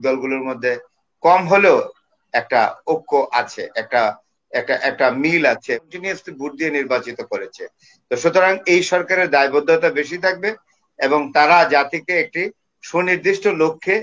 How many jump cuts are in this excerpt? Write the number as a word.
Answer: one